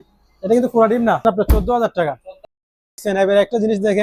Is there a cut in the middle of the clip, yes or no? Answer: yes